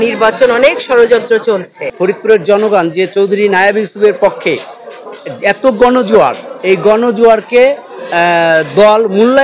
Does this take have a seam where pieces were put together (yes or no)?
yes